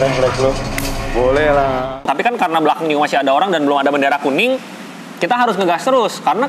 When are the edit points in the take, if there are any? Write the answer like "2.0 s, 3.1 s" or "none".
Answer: 2.0 s